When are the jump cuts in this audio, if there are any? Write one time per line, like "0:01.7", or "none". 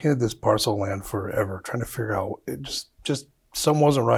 none